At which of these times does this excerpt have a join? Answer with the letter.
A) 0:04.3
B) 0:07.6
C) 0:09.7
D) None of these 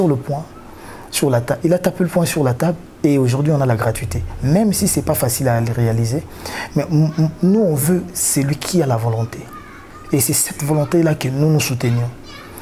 D